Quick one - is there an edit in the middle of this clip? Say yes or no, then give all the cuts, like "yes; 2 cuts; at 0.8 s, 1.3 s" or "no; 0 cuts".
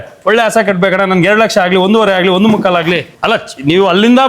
yes; 1 cut; at 3.1 s